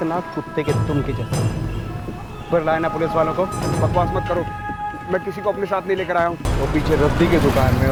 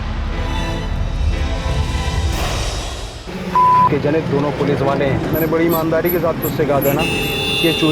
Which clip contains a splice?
second; 1 cut; at 5.2 s

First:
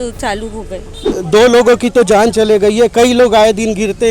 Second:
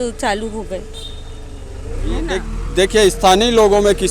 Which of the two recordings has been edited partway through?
first; 1 cut; at 1.2 s

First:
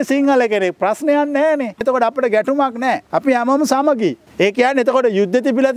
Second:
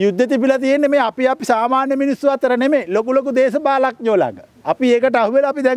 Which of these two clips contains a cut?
first; 3 cuts; at 1.8 s, 3.0 s, 4.2 s

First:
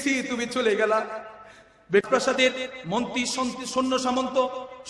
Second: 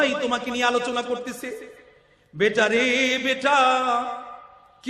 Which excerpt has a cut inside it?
first; 1 cut; at 2.0 s

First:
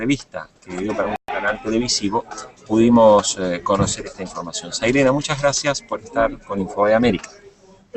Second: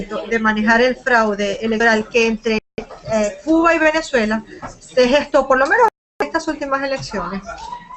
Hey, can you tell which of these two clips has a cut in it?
first; 1 cut; at 1.0 s

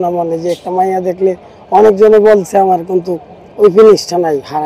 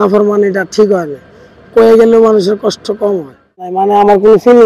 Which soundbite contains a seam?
second; 1 cut; at 3.8 s

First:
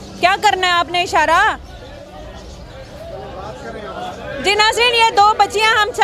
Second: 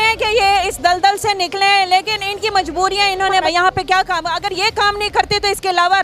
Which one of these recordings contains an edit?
second; 1 cut; at 3.5 s

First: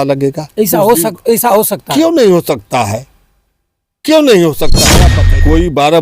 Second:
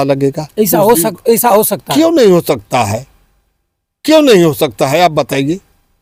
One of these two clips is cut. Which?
first; 1 cut; at 5.0 s

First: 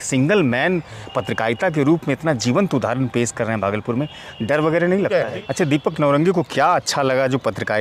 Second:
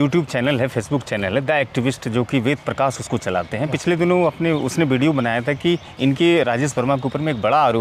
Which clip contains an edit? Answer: first; 1 cut; at 5.1 s

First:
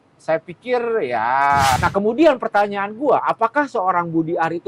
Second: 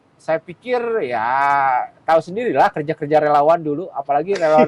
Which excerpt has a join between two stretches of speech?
first; 1 cut; at 1.8 s

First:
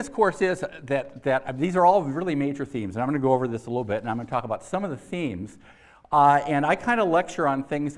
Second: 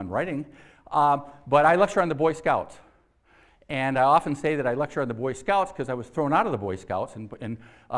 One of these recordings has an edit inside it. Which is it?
second; 1 cut; at 3.3 s

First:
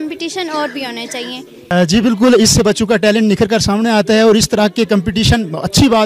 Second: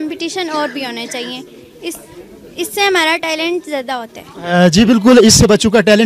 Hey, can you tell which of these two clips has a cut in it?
first; 1 cut; at 1.7 s

